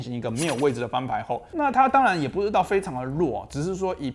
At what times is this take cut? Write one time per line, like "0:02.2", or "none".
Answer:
0:01.5